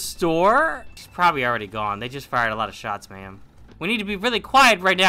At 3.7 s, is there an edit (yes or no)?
yes